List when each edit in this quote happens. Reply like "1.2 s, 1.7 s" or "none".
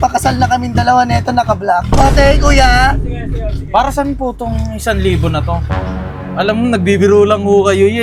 none